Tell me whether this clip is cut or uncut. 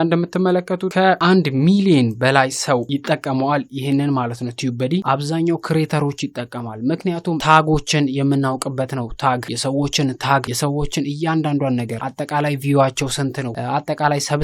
cut